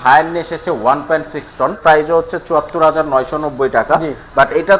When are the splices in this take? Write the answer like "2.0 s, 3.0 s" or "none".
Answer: 1.8 s